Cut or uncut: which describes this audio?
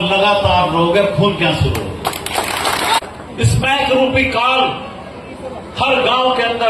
cut